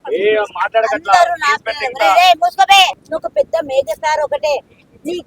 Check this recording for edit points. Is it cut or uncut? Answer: cut